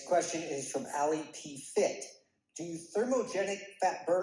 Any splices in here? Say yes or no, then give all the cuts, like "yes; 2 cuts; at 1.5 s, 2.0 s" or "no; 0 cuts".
no; 0 cuts